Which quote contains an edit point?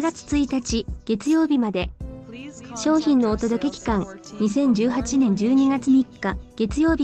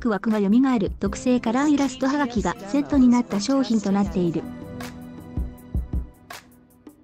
second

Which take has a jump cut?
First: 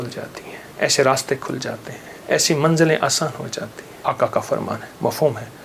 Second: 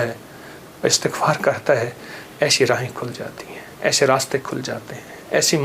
first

